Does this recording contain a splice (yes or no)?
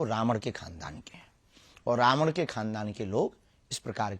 no